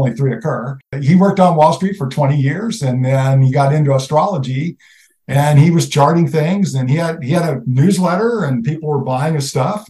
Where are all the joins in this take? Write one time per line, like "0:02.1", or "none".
0:00.9